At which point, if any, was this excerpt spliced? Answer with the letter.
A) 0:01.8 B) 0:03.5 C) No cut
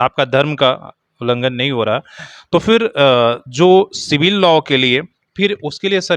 C